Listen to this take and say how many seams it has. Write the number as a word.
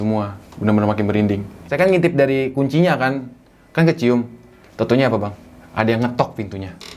one